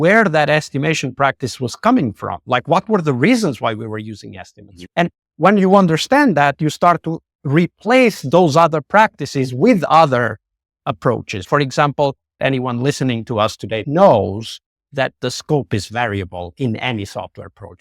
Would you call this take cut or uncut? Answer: uncut